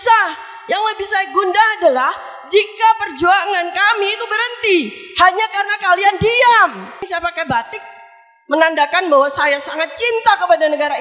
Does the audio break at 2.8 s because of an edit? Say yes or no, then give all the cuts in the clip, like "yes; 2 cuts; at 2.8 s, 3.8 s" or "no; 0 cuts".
no; 1 cut; at 7.0 s